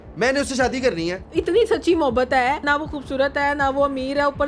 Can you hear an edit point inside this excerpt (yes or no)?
yes